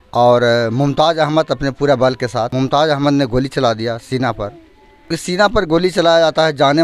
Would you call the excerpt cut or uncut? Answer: cut